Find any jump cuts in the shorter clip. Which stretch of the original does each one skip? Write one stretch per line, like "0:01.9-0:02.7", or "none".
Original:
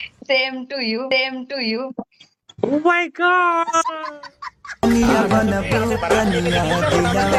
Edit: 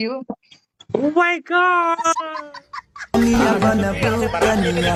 none